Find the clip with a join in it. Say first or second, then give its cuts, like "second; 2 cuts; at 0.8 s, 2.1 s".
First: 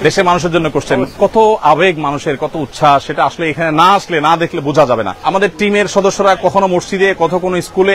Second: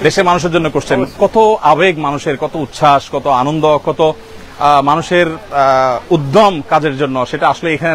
first; 2 cuts; at 3.1 s, 5.1 s